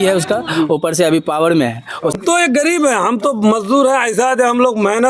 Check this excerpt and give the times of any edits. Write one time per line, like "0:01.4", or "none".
0:02.2